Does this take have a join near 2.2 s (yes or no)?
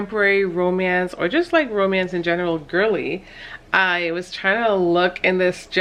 no